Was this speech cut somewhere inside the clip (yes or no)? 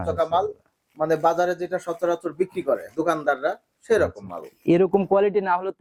no